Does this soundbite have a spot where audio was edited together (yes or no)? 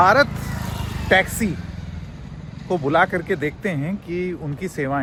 no